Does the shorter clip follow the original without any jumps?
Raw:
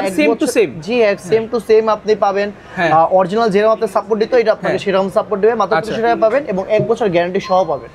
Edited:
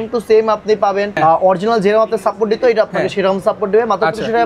no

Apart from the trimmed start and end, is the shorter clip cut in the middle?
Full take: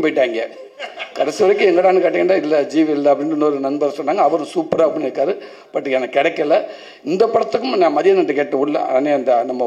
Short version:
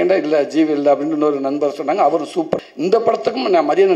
yes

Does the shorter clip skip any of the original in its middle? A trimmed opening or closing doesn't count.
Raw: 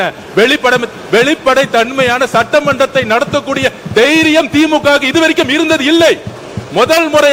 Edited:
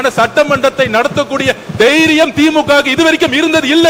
no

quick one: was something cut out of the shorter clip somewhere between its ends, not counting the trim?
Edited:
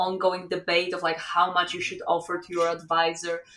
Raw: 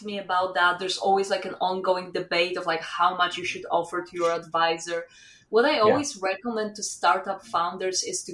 no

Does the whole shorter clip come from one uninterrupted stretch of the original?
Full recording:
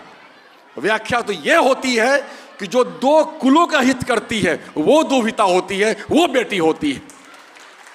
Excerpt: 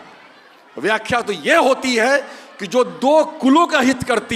yes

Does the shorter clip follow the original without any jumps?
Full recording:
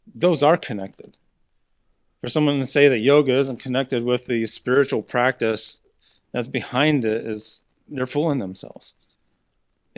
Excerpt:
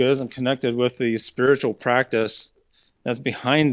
yes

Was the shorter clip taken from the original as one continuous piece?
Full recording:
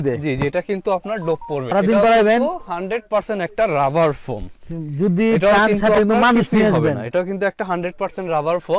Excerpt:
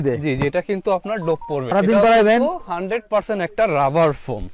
yes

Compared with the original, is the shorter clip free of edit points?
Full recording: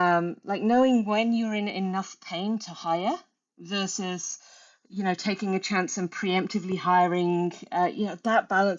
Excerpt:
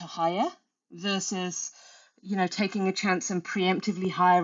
yes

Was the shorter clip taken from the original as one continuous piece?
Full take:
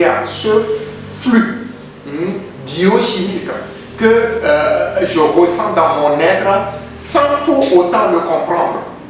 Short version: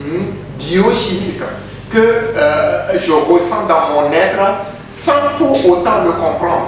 yes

